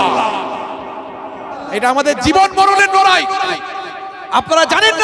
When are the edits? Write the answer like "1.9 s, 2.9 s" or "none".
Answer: 1.6 s

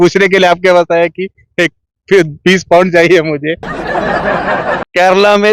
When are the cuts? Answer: none

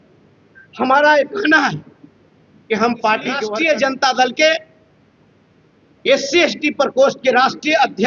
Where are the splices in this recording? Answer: 3.4 s

